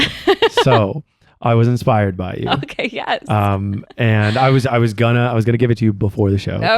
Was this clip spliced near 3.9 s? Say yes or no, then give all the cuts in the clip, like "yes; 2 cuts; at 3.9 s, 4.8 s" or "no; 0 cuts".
no; 0 cuts